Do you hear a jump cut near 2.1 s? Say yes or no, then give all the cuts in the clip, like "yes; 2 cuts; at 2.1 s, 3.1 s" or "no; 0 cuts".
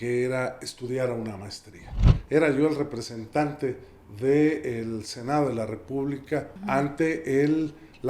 yes; 2 cuts; at 2.1 s, 6.5 s